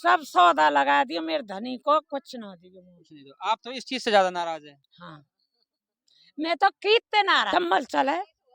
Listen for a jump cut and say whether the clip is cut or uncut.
cut